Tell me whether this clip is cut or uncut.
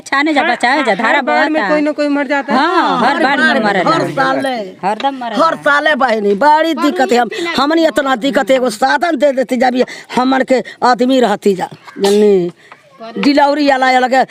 uncut